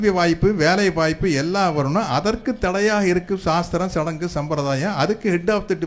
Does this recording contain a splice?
no; 0 cuts

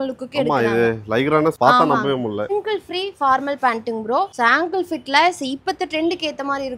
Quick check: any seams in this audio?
yes; 3 cuts; at 1.5 s, 2.5 s, 4.3 s

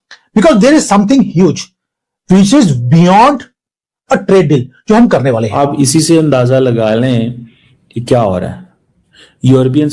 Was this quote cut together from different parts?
yes; 1 cut; at 5.6 s

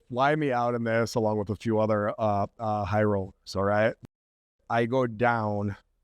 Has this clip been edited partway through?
yes; 1 cut; at 4.5 s

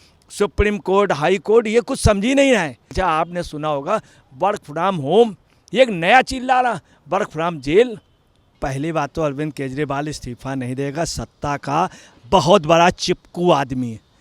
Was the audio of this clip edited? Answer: yes; 2 cuts; at 2.9 s, 8.6 s

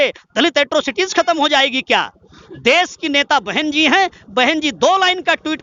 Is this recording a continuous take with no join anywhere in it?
yes; 0 cuts

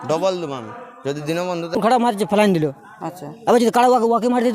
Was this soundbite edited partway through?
yes; 1 cut; at 1.7 s

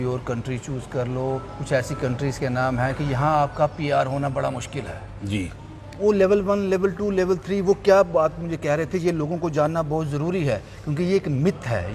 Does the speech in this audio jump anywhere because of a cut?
no; 0 cuts

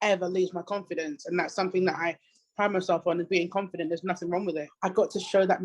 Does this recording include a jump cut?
yes; 1 cut; at 4.7 s

